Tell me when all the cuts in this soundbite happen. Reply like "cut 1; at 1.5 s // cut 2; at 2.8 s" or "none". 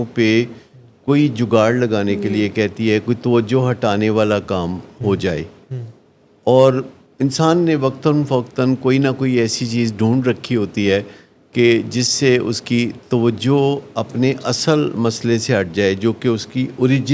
none